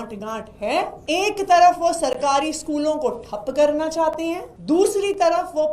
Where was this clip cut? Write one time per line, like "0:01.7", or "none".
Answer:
0:01.0
0:04.5